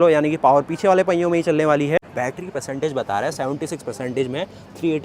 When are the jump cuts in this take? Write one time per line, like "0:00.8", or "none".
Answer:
0:02.1